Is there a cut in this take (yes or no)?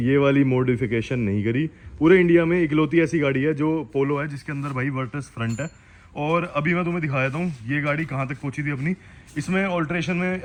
no